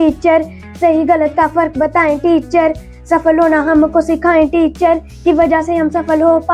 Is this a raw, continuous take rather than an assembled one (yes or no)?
yes